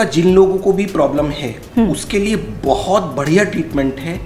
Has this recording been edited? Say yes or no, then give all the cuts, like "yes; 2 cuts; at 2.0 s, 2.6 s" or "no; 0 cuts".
no; 0 cuts